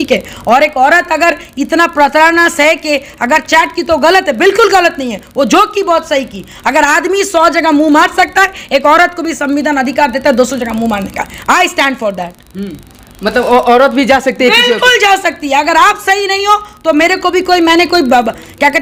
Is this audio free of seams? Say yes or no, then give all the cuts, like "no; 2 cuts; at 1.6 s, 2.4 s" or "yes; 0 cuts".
yes; 0 cuts